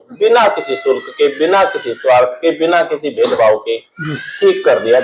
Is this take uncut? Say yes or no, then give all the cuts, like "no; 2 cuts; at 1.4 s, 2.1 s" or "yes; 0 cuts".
yes; 0 cuts